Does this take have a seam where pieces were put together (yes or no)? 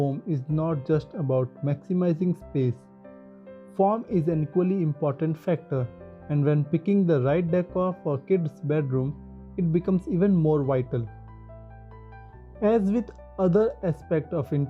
yes